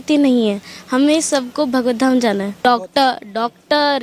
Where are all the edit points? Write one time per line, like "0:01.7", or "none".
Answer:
0:02.5